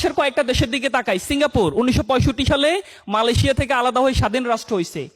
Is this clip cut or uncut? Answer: uncut